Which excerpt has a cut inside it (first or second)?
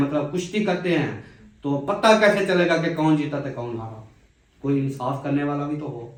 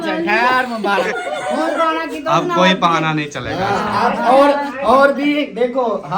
second